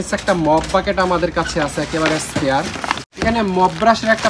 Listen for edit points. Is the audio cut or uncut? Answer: cut